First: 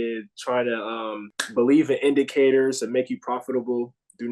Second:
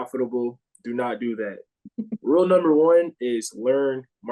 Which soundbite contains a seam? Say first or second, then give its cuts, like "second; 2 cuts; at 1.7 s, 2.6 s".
first; 1 cut; at 1.3 s